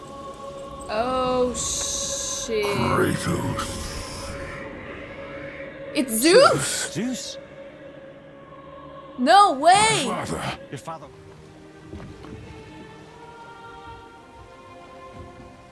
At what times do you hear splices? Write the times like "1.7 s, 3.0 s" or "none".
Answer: 11.0 s